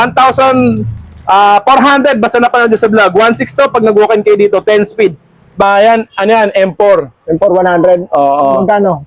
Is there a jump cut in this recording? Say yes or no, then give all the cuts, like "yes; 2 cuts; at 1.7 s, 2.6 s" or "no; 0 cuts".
yes; 1 cut; at 5.6 s